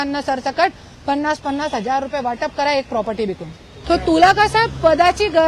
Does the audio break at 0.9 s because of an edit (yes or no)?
no